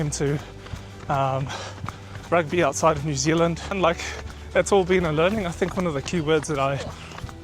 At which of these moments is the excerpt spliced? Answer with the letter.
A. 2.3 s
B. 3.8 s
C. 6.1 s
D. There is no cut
B